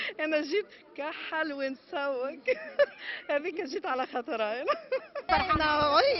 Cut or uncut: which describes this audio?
cut